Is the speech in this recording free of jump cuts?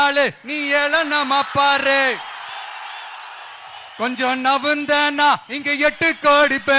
no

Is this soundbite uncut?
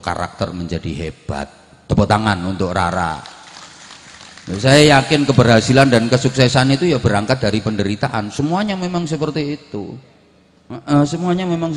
yes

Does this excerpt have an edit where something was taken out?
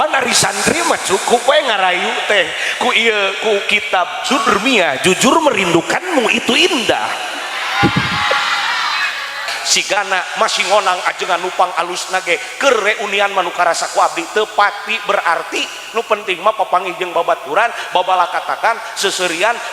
yes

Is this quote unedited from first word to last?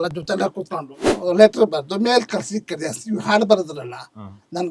no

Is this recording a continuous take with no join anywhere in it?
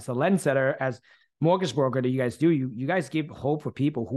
yes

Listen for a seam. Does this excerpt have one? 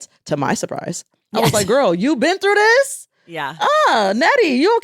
no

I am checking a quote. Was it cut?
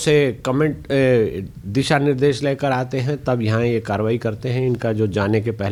no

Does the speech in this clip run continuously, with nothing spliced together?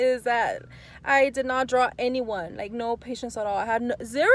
yes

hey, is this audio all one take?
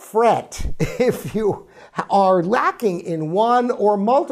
yes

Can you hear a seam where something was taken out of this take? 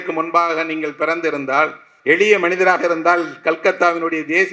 yes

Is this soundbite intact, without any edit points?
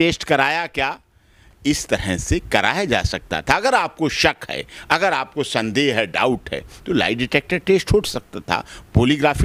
yes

